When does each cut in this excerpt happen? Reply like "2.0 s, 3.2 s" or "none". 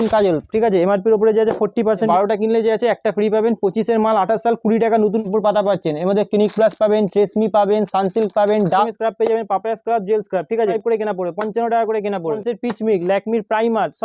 2.1 s, 5.2 s, 8.9 s, 10.8 s, 12.4 s